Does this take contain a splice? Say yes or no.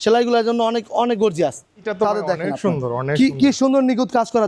yes